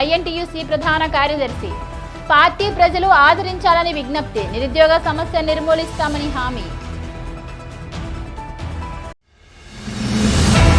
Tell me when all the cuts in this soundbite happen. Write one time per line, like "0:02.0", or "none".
none